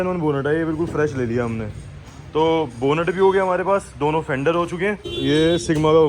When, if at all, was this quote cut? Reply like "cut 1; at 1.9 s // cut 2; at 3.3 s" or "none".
cut 1; at 5.1 s